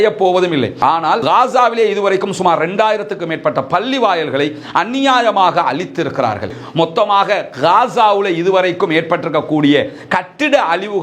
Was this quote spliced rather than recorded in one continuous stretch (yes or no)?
yes